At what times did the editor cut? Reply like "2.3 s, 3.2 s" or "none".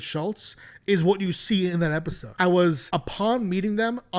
2.2 s, 2.8 s